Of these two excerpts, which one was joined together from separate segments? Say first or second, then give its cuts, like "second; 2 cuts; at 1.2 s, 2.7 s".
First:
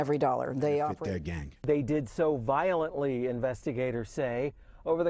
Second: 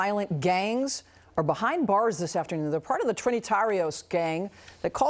first; 1 cut; at 0.9 s